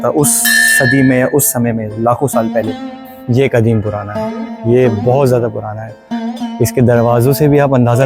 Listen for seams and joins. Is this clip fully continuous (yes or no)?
no